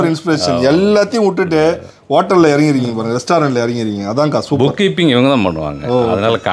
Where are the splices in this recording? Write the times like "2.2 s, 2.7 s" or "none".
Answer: none